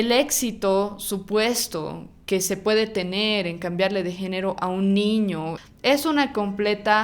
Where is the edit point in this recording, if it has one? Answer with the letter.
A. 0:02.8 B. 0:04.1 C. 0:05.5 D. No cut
C